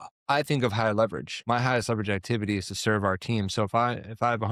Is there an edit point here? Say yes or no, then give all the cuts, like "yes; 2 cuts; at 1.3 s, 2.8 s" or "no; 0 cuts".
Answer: no; 0 cuts